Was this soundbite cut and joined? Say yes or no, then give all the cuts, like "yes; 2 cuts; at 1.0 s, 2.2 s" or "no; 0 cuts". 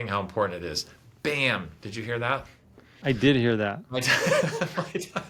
no; 0 cuts